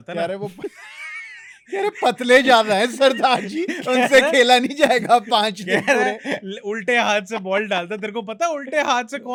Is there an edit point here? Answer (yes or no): no